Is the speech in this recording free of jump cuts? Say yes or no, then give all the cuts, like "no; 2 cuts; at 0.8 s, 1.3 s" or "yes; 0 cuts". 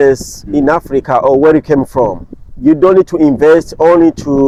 yes; 0 cuts